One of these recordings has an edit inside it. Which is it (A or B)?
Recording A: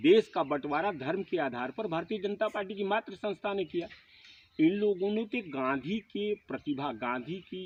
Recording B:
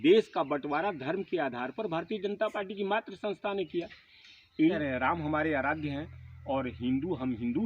B